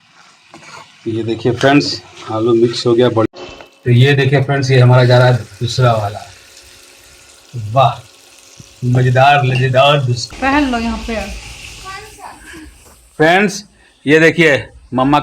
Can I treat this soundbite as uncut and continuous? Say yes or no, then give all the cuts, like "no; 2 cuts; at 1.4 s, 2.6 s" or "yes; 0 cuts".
no; 2 cuts; at 3.3 s, 10.2 s